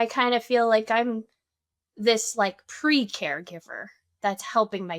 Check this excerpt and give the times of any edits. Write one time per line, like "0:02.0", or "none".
none